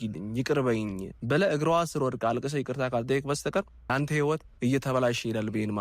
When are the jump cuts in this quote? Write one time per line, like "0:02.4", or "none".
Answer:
0:01.1
0:03.8